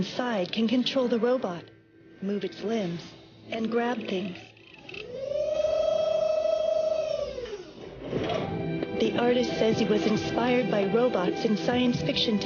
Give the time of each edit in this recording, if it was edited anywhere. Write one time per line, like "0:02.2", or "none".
none